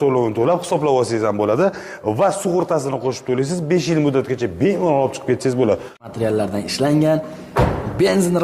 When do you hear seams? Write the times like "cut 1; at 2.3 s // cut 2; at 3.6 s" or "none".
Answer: cut 1; at 6.1 s